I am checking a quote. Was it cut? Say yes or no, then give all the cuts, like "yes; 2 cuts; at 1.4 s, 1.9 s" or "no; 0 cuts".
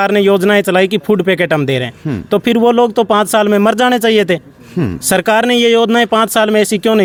no; 0 cuts